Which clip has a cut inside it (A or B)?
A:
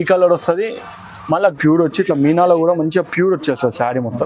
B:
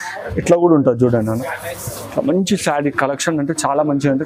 A